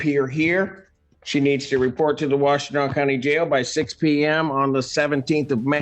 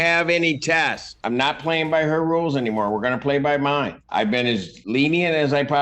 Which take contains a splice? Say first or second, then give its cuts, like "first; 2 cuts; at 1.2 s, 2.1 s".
second; 2 cuts; at 1.1 s, 4.4 s